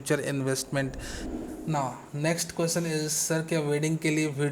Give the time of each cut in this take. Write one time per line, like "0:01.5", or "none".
0:01.5